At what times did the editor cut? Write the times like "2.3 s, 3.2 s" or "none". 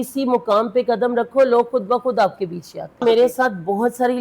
3.0 s